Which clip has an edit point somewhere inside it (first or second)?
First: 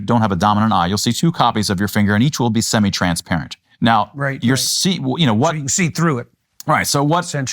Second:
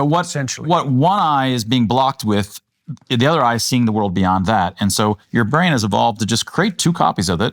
first